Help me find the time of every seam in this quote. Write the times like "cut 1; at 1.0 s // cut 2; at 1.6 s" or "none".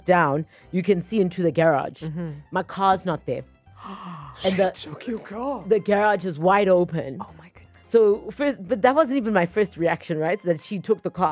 none